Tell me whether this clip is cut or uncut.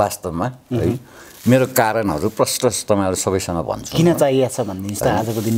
uncut